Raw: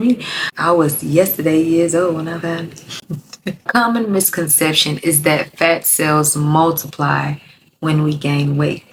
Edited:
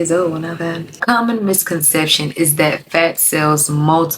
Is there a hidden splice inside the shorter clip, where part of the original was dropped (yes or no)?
yes